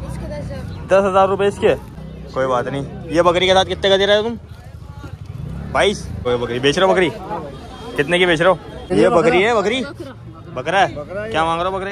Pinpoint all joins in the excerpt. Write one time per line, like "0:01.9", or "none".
0:01.9
0:06.2
0:08.9

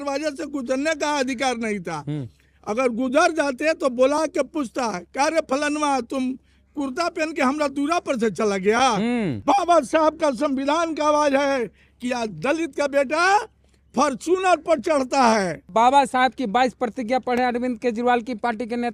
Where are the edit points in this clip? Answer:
0:09.4
0:15.7

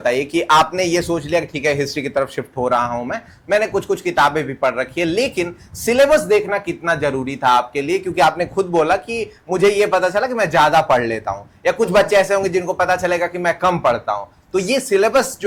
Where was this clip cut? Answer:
none

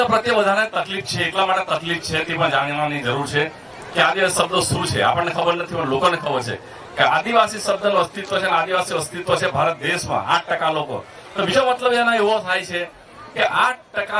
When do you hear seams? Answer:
none

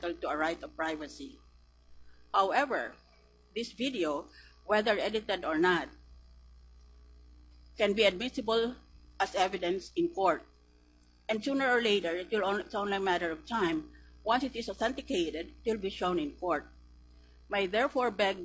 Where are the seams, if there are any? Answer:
0:07.5

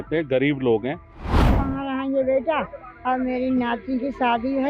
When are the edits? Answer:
0:01.3

